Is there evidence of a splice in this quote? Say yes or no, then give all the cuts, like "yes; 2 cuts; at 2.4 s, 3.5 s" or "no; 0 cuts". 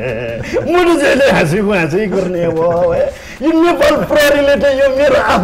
no; 0 cuts